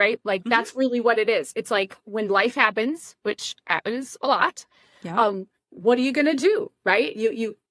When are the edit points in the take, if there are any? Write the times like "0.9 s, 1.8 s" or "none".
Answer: none